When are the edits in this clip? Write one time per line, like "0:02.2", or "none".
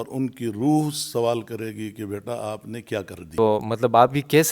0:03.4